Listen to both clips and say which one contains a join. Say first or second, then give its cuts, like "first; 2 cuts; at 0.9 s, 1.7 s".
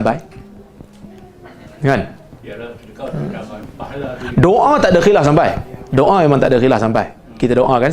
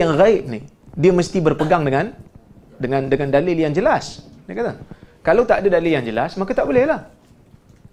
first; 1 cut; at 3.6 s